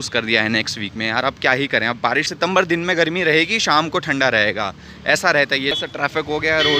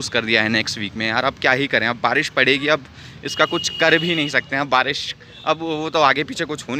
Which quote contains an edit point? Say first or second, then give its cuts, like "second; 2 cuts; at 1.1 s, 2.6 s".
first; 2 cuts; at 2.3 s, 5.7 s